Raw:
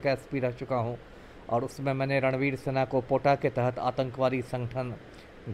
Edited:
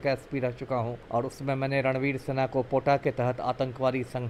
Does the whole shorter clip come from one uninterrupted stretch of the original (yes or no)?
no